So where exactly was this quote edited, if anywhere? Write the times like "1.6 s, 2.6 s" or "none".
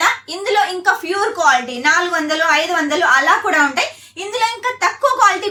none